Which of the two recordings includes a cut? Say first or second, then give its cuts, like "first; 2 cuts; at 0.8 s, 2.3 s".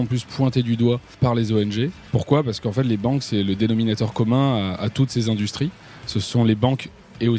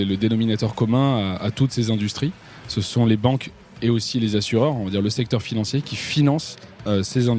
first; 2 cuts; at 1.2 s, 2.0 s